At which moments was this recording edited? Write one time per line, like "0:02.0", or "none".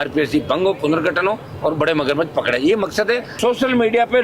0:03.3

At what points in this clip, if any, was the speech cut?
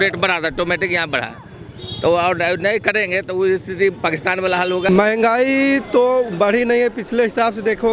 0:04.9

